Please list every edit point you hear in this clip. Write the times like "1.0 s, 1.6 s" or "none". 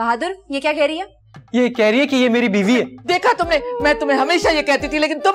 3.0 s